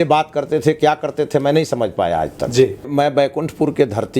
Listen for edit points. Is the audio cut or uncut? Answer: cut